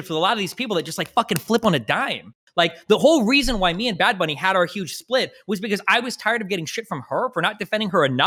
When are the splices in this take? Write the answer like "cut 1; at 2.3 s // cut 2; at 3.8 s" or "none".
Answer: none

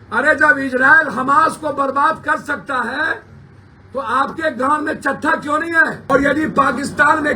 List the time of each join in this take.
cut 1; at 6.1 s

